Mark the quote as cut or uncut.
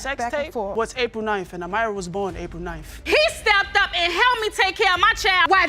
cut